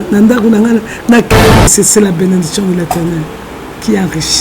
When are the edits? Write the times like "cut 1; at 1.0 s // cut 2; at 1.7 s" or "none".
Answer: cut 1; at 1.3 s